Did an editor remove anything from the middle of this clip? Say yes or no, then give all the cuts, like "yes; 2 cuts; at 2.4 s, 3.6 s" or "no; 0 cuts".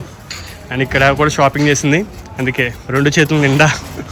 yes; 1 cut; at 2.8 s